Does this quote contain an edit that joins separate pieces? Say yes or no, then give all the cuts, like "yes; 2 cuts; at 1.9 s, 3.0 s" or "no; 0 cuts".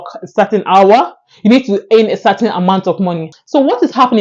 yes; 1 cut; at 3.3 s